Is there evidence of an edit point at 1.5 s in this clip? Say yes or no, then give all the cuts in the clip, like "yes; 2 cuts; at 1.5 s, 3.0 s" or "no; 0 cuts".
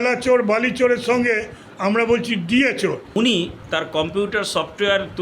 no; 2 cuts; at 3.1 s, 3.6 s